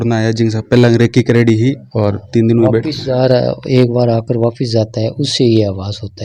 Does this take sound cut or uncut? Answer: uncut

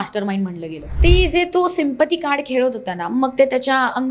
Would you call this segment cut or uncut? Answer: cut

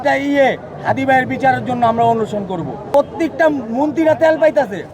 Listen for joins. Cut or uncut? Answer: cut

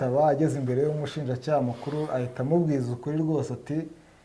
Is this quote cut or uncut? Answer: uncut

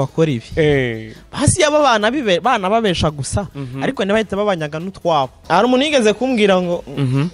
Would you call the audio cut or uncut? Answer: cut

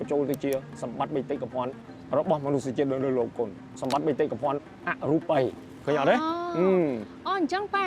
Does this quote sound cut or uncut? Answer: uncut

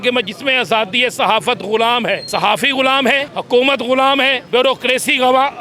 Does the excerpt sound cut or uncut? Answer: cut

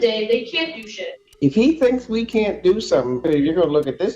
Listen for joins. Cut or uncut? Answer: cut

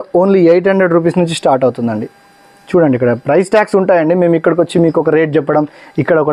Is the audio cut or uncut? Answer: uncut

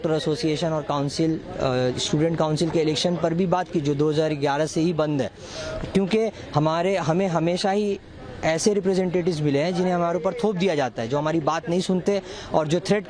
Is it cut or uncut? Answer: uncut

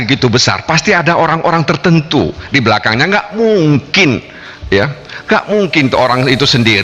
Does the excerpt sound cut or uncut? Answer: uncut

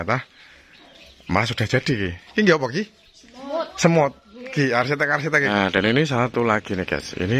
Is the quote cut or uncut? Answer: cut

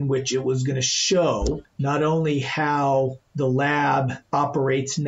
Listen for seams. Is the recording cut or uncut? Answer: cut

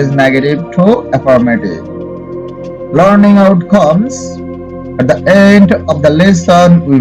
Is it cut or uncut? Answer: uncut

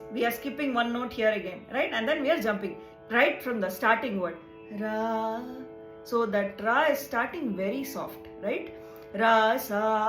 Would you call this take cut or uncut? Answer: cut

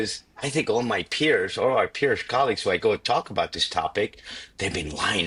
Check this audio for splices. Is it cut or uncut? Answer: uncut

